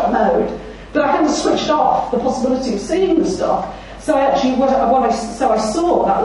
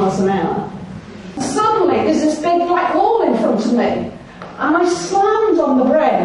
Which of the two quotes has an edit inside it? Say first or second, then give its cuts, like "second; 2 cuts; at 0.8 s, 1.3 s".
second; 1 cut; at 1.4 s